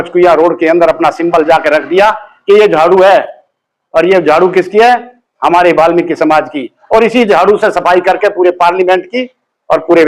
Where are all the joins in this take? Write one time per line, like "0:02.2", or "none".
none